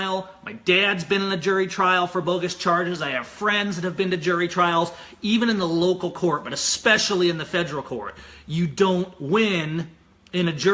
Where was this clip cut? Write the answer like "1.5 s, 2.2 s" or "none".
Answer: 6.1 s